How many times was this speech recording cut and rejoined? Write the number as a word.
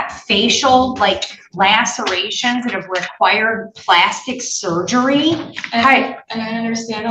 zero